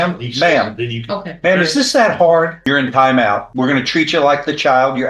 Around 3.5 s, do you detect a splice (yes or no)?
yes